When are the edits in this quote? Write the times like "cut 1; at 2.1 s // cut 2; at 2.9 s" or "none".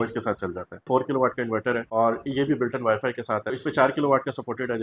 cut 1; at 0.9 s // cut 2; at 1.8 s // cut 3; at 3.5 s